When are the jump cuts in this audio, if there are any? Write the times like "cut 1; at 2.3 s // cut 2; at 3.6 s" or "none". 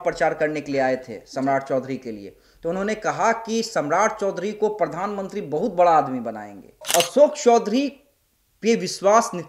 cut 1; at 6.8 s